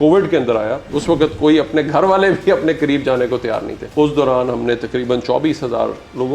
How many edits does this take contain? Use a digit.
2